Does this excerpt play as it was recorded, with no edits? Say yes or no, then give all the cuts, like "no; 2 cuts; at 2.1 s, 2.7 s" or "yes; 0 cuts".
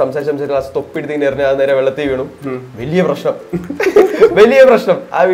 yes; 0 cuts